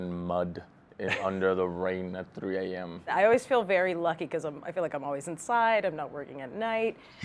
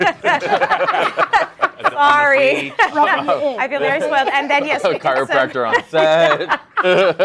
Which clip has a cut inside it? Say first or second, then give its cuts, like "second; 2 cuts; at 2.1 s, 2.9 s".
first; 1 cut; at 3.1 s